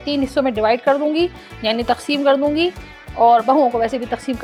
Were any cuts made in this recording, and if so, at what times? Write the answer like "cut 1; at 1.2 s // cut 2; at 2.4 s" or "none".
none

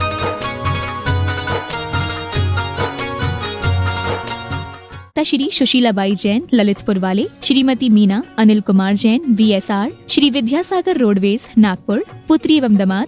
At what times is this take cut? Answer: cut 1; at 1.1 s // cut 2; at 5.1 s

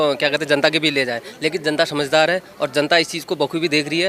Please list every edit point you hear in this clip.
none

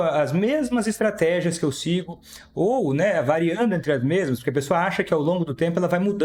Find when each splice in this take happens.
none

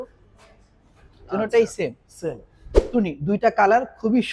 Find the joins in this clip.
cut 1; at 2.8 s

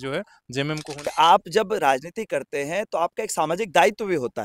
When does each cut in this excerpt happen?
cut 1; at 1.1 s

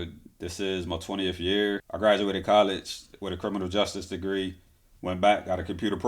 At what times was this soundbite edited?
cut 1; at 1.9 s

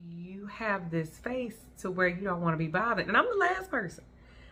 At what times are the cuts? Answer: none

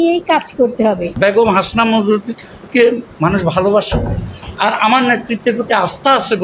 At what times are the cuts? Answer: cut 1; at 1.1 s

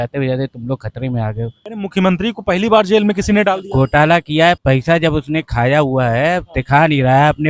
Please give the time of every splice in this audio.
cut 1; at 1.6 s // cut 2; at 4.6 s

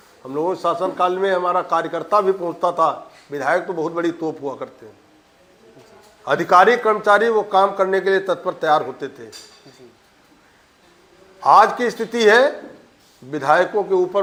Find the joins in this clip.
none

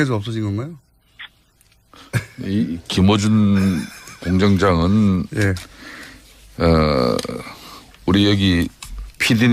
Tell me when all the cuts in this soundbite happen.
none

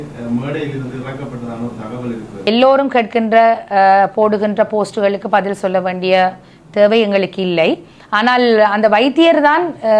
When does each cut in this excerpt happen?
cut 1; at 2.3 s

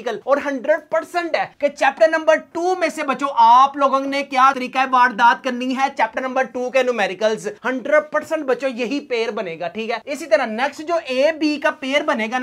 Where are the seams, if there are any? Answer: none

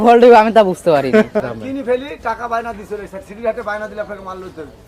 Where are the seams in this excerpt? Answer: cut 1; at 1.4 s

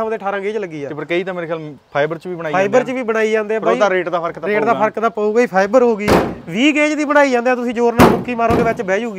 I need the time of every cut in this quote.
none

